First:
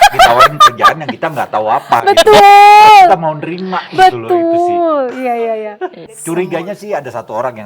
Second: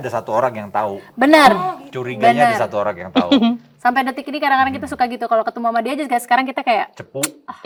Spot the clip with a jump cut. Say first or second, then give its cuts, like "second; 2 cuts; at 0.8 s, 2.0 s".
first; 1 cut; at 6.0 s